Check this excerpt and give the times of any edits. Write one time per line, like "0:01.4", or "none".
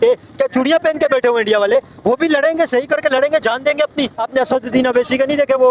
0:04.2